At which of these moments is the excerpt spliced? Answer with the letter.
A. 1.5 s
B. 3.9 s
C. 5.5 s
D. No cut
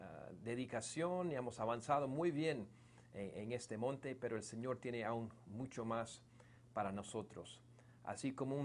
A